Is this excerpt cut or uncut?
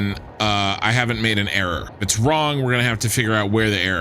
cut